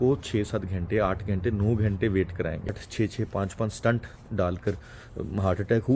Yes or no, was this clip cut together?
yes